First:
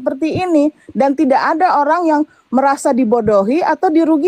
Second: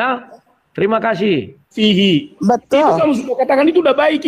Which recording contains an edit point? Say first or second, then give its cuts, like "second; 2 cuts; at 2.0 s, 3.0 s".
second; 1 cut; at 1.7 s